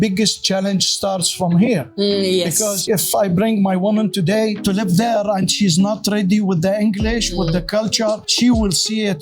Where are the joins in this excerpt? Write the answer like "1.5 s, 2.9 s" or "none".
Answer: 2.8 s, 4.6 s